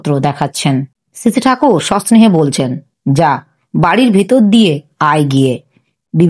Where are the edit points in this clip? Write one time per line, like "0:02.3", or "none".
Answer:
0:01.0